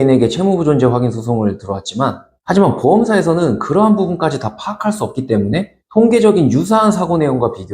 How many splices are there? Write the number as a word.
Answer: one